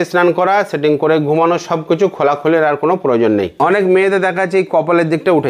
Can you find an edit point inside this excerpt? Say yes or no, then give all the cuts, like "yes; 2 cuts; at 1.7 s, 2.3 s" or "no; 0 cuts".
yes; 1 cut; at 3.5 s